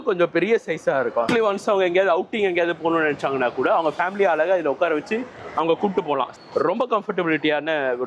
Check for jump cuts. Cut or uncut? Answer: cut